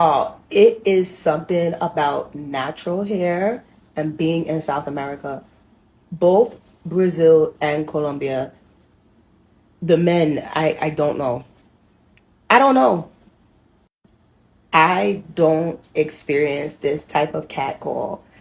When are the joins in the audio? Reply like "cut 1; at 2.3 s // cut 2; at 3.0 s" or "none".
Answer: none